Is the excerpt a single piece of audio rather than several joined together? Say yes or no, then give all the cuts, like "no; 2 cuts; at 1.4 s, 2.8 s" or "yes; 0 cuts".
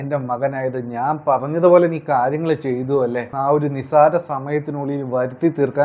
no; 1 cut; at 3.3 s